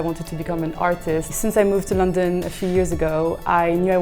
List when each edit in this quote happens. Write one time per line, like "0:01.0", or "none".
0:01.4